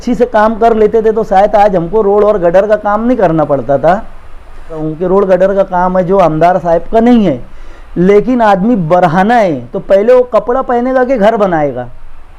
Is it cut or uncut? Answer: cut